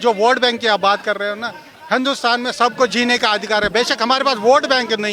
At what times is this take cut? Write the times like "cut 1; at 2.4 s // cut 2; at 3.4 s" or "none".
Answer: none